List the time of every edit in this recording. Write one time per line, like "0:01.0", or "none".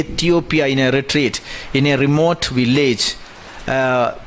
none